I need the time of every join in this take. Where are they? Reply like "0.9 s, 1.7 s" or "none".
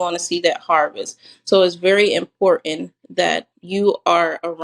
3.5 s